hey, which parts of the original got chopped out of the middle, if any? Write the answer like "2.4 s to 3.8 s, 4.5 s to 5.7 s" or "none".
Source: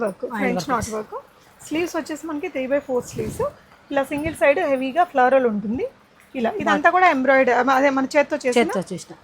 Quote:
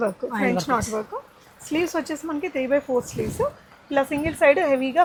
none